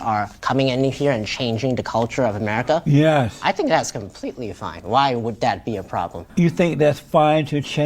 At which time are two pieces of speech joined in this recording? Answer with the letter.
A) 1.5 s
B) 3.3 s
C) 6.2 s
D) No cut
C